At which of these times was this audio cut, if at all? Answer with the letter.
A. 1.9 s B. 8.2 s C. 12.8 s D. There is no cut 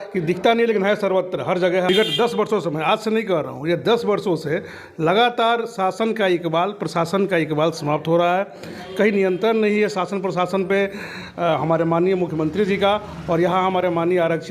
A